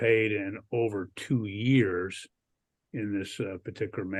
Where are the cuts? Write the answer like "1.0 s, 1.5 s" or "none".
none